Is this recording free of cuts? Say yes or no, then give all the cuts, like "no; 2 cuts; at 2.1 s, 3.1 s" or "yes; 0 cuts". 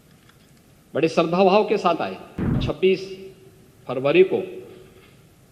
no; 1 cut; at 2.6 s